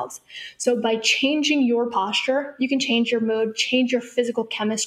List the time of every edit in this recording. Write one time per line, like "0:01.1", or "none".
0:02.8

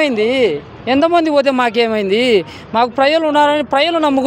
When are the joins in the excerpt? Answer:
none

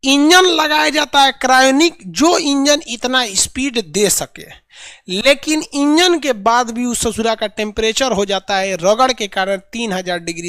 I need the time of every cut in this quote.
none

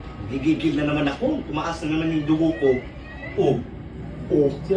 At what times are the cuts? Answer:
0:03.2

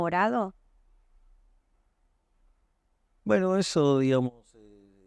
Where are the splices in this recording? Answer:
none

